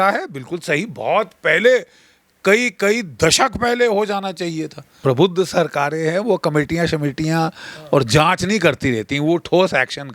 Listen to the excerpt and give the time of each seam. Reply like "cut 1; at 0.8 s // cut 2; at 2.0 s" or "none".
cut 1; at 4.9 s

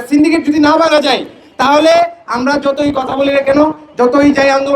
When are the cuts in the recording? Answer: none

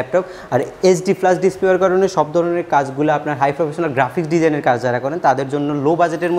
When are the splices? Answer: none

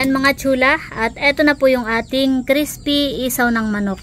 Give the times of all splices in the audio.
none

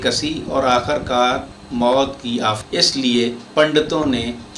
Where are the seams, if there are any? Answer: cut 1; at 2.6 s

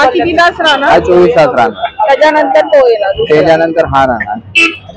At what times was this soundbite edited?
none

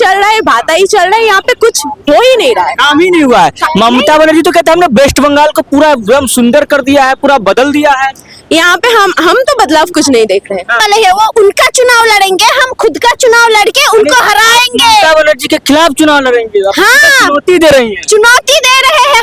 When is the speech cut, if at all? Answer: cut 1; at 10.8 s

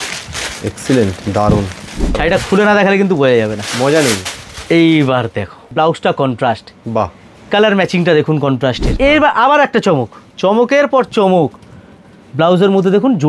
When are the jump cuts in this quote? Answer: cut 1; at 2.2 s // cut 2; at 5.7 s // cut 3; at 8.9 s

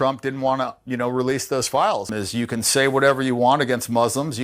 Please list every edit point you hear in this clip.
cut 1; at 2.1 s

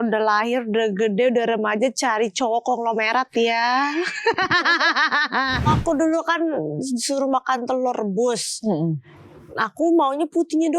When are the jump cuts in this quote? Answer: cut 1; at 5.7 s

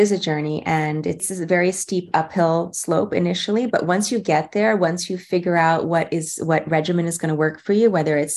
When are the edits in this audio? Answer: cut 1; at 1.2 s

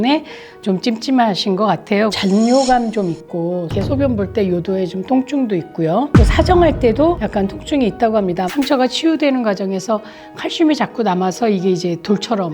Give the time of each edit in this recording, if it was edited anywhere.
cut 1; at 2.1 s // cut 2; at 3.7 s // cut 3; at 8.5 s

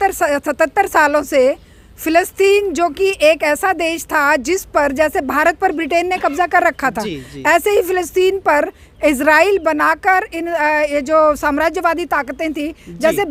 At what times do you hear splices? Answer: none

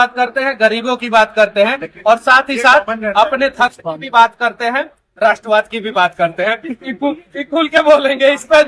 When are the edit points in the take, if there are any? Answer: none

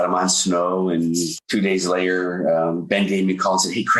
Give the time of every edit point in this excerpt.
cut 1; at 1.3 s

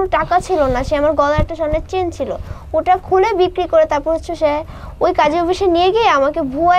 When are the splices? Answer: none

